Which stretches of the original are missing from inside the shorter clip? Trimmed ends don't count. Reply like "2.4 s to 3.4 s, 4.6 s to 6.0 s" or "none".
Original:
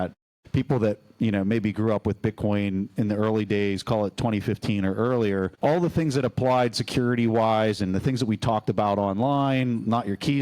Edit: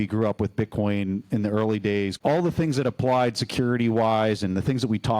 3.8 s to 5.5 s

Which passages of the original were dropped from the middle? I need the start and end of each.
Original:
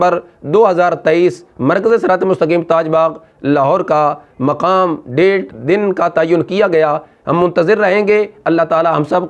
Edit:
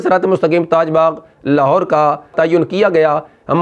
4.3 s to 6.1 s

